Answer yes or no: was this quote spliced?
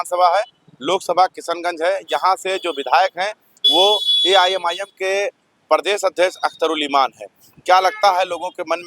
no